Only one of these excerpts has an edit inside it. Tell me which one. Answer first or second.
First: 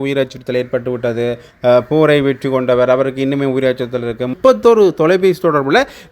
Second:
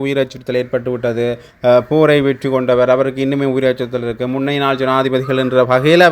first